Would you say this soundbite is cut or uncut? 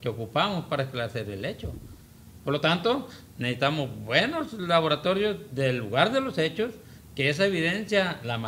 uncut